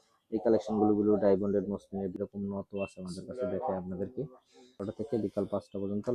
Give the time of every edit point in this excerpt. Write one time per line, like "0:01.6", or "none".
0:02.1
0:04.9